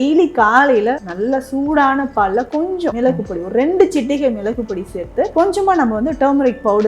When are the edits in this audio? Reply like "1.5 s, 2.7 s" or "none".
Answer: 1.1 s, 2.9 s, 5.3 s